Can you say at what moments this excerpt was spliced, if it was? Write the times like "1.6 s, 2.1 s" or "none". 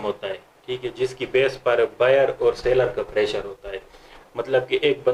none